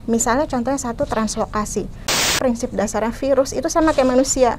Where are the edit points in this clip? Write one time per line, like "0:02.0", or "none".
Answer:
0:02.3